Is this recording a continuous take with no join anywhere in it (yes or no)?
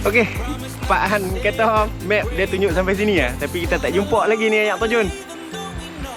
yes